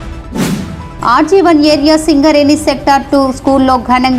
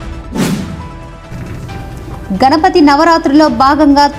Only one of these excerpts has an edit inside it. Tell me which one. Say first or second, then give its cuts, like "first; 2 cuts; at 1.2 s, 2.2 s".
first; 1 cut; at 0.9 s